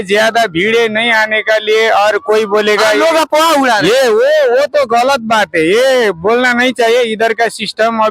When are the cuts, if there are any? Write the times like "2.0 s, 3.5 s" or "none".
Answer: none